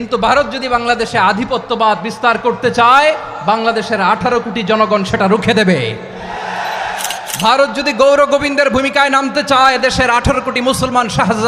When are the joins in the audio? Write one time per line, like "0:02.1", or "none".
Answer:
none